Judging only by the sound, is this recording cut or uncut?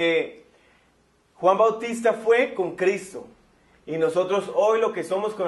cut